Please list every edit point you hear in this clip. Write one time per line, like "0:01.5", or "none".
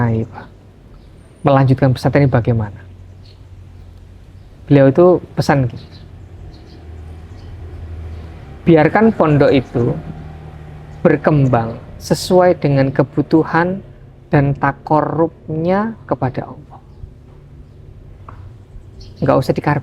none